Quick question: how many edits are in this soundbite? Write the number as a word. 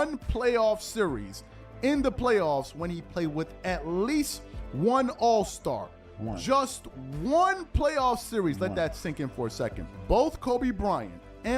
one